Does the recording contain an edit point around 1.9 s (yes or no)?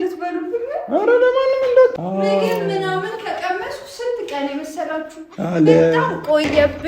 yes